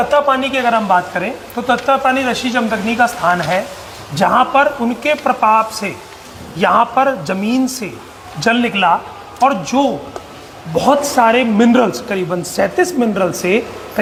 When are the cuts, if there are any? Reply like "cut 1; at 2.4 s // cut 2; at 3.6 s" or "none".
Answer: none

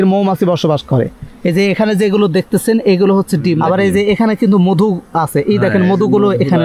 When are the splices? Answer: cut 1; at 1.2 s // cut 2; at 3.6 s

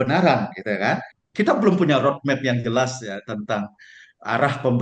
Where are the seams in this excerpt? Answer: cut 1; at 1.2 s

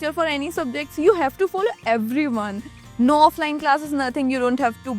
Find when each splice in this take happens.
cut 1; at 2.8 s

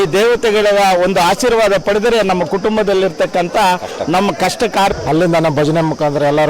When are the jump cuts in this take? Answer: cut 1; at 5.0 s

